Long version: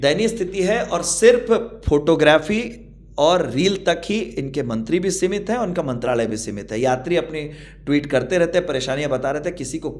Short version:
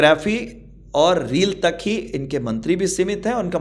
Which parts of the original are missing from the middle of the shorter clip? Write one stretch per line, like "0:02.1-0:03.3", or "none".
none